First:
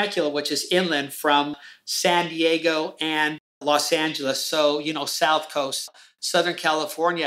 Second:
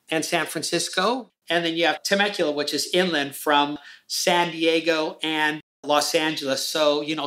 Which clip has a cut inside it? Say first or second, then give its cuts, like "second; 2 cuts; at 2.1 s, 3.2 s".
second; 1 cut; at 1.3 s